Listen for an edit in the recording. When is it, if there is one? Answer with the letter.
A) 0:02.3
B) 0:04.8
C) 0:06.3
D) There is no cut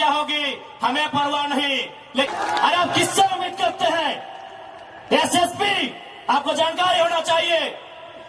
A